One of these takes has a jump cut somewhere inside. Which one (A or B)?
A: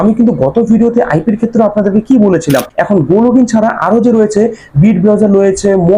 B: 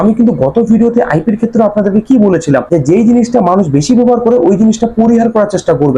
A